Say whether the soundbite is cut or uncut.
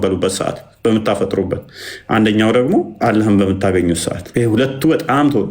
cut